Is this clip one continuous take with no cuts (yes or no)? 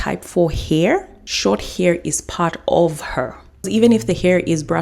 no